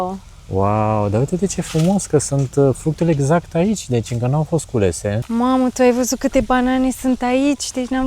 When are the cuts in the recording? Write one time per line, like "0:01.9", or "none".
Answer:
0:05.2